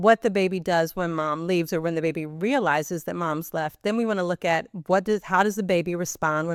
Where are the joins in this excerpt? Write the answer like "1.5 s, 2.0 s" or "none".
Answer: none